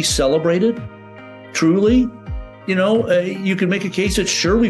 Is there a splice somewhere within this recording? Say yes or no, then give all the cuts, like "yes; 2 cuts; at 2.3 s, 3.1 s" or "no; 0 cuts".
no; 0 cuts